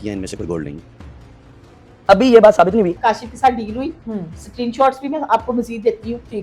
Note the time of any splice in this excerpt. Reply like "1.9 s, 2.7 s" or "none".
3.0 s